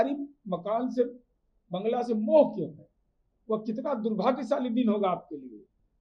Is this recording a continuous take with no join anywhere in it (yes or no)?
no